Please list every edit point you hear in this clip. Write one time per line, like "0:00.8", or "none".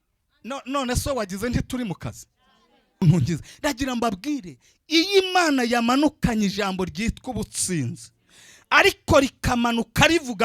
0:03.0